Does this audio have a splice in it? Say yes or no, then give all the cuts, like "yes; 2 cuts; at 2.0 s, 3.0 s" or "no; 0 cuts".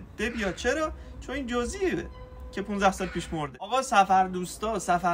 yes; 1 cut; at 3.7 s